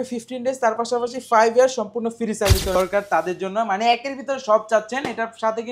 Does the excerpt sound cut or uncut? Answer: cut